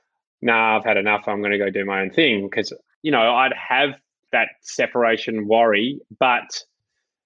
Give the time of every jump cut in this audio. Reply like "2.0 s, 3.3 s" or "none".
2.8 s, 4.2 s